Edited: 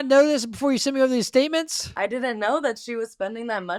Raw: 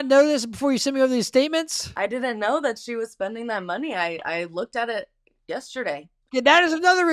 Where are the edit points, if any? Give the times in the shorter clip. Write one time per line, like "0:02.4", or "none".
none